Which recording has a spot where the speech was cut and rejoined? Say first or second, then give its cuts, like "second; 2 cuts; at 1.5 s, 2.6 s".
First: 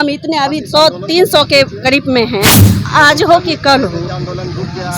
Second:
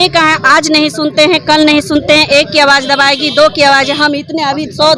first; 1 cut; at 2.6 s